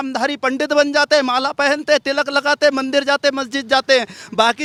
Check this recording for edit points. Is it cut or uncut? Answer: uncut